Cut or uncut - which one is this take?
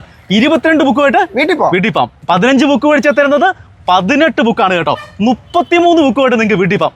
uncut